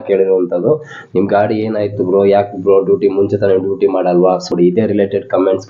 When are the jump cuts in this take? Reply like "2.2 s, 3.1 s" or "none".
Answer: 4.5 s